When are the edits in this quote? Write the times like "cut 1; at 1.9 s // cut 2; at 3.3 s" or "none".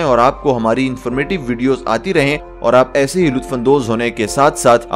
cut 1; at 2.5 s